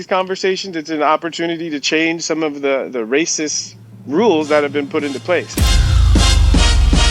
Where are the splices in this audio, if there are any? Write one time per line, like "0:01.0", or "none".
0:05.6